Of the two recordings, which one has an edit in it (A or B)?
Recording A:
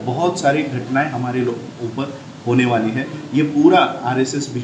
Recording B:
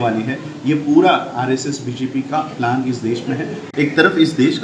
B